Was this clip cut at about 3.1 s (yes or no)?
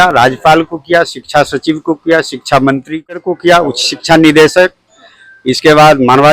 yes